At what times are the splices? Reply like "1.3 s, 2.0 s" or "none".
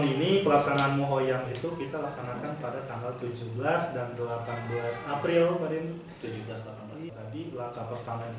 7.0 s